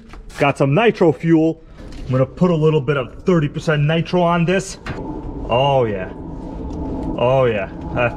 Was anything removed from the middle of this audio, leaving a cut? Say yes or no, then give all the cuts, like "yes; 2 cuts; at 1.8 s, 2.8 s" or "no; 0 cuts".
yes; 2 cuts; at 1.7 s, 5.1 s